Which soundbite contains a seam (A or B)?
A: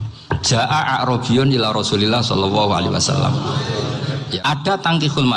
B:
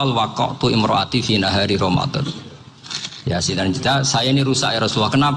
A